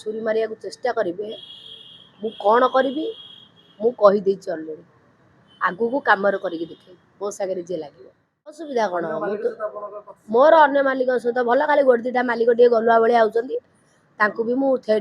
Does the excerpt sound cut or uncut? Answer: cut